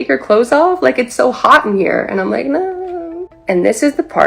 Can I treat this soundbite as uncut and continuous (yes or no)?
no